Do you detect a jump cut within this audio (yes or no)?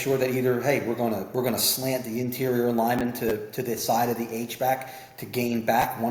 no